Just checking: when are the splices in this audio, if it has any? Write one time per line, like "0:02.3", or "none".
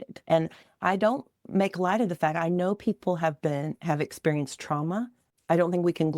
0:05.2